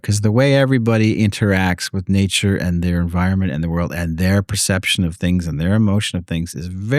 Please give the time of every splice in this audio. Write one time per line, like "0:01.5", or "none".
none

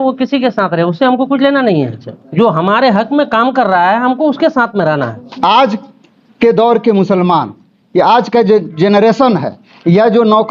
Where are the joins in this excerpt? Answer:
none

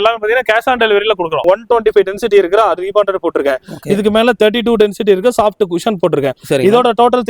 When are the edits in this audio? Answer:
0:01.4

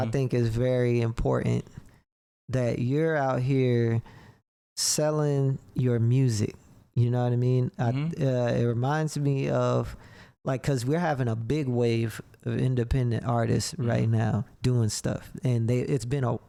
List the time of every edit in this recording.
none

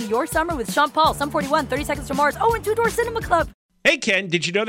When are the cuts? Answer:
0:03.6

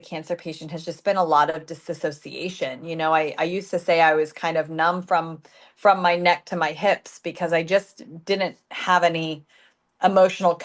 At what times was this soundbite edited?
none

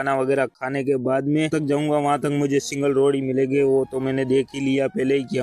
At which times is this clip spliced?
0:01.5

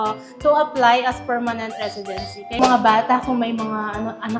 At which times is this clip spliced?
0:02.6

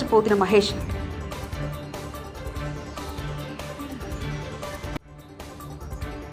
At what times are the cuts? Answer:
none

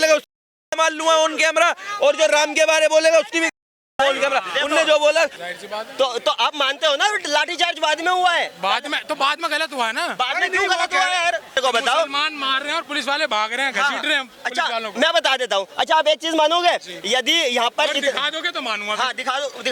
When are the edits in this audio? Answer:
0:05.5
0:11.6

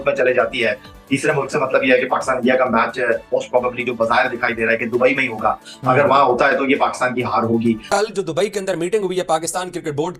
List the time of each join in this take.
0:07.9

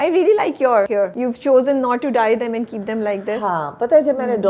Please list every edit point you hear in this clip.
0:01.0

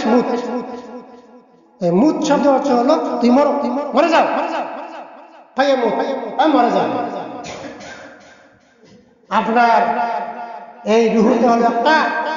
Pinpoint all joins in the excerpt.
none

